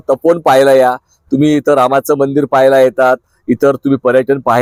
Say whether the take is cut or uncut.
uncut